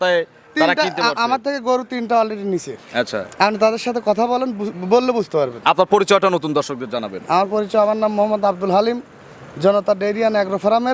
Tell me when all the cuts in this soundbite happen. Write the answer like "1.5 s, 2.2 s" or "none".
none